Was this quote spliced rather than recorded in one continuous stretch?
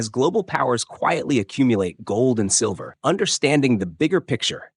yes; 1 cut; at 2.9 s

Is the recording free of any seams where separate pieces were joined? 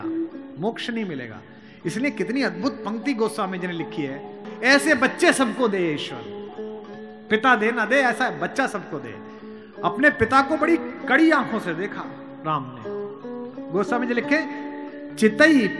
no; 1 cut; at 4.4 s

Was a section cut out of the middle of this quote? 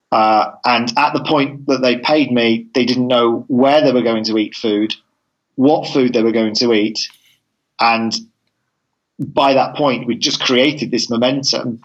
no; 0 cuts

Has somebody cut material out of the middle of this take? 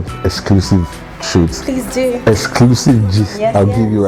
no; 0 cuts

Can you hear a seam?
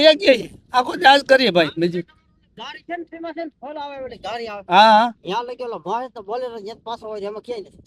no; 0 cuts

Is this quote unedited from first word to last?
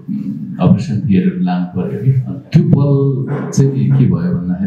no; 2 cuts; at 2.3 s, 3.4 s

